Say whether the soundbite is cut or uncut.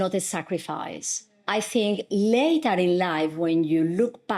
uncut